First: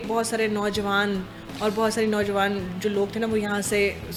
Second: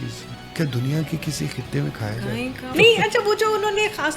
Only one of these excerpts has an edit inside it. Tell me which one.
second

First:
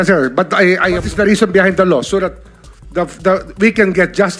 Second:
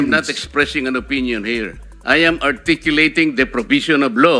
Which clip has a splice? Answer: first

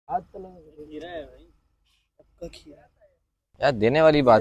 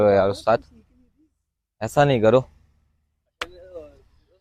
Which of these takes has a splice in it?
first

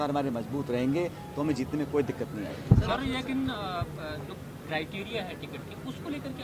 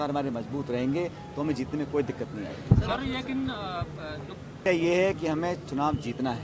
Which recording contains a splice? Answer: second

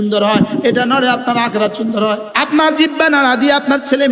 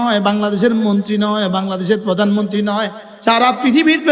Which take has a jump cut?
first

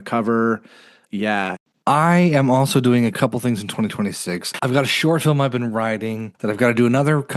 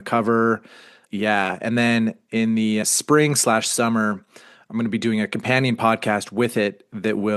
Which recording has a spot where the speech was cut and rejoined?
first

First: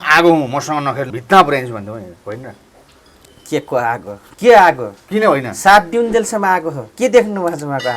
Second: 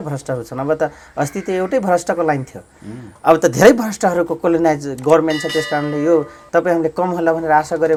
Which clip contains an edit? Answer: first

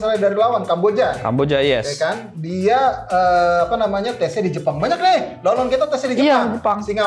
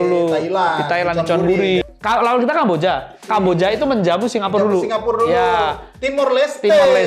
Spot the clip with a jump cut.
second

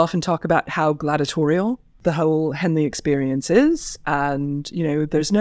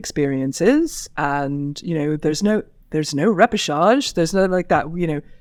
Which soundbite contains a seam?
first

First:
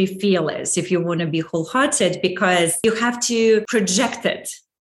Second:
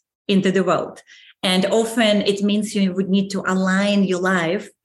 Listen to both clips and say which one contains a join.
first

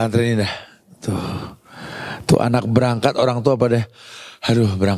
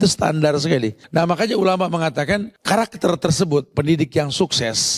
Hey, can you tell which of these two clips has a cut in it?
second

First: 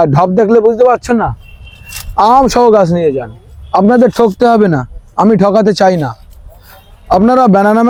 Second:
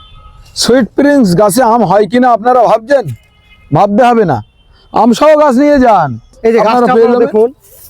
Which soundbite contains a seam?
second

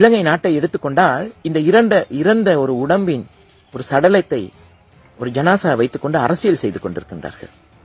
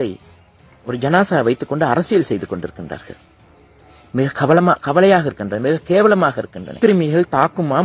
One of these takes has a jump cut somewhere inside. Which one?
second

